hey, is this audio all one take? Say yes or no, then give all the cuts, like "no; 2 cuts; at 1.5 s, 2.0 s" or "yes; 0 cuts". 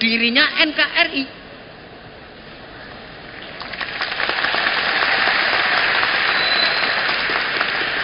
yes; 0 cuts